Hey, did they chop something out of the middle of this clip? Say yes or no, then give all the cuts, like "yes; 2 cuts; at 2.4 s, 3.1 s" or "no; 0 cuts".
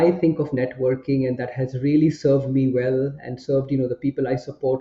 no; 0 cuts